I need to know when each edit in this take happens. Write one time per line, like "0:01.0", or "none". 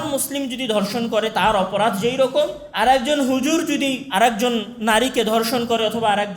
0:02.6
0:04.0

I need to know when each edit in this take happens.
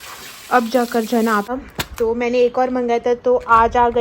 0:01.5

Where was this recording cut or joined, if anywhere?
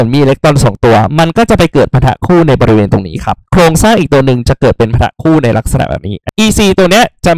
0:03.4
0:06.2

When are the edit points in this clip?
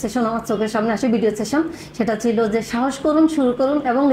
none

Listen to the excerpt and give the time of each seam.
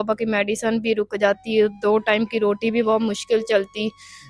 none

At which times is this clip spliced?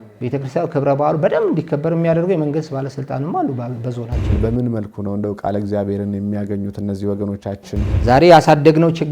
0:04.3
0:07.9

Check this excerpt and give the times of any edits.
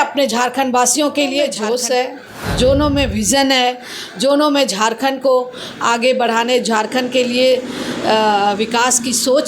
0:01.6

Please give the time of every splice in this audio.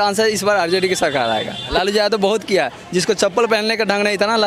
0:01.7

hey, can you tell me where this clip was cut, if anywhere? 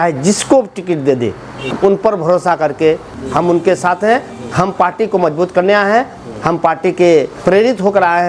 0:01.7
0:03.2
0:07.4

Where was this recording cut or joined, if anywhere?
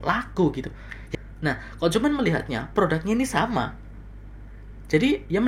0:00.9

